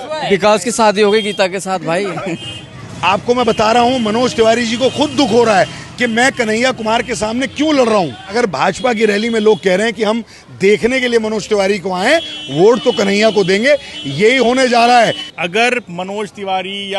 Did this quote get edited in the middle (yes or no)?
yes